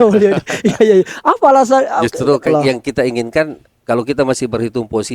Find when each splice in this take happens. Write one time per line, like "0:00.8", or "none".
0:02.5